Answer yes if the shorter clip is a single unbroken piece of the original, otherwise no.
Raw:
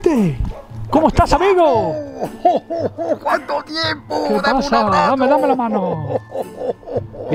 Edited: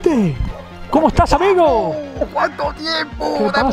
no